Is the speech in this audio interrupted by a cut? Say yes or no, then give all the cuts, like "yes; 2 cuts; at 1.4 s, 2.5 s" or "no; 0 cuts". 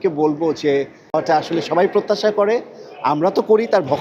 yes; 1 cut; at 1.2 s